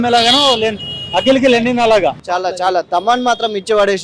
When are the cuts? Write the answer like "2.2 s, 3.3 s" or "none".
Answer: 2.2 s